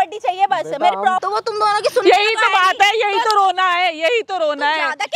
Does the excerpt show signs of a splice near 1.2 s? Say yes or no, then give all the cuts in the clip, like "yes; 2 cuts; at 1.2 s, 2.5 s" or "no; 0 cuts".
yes; 1 cut; at 1.2 s